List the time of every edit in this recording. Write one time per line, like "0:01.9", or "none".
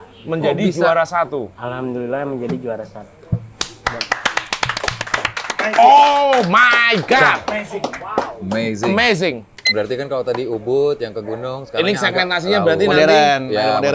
0:09.7